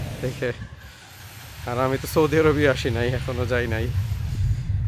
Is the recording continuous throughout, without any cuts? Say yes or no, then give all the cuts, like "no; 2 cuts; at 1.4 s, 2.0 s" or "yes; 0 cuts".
no; 1 cut; at 3.9 s